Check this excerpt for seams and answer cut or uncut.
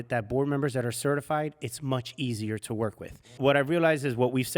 cut